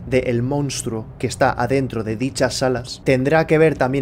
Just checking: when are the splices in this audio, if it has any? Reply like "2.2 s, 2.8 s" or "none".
2.9 s